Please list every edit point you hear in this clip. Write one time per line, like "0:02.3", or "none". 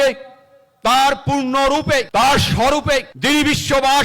0:02.1
0:03.1